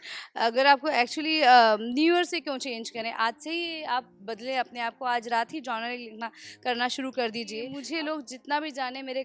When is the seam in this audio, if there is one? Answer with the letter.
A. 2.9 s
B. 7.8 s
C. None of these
B